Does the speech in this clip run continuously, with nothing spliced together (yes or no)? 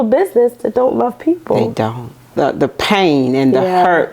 no